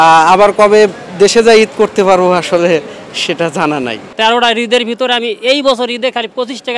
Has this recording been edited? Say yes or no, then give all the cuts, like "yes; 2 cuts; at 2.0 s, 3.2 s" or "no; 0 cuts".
yes; 1 cut; at 4.1 s